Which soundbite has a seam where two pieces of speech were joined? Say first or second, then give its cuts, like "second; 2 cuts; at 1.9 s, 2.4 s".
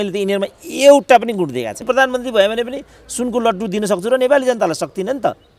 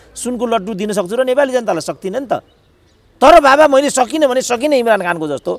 first; 1 cut; at 1.8 s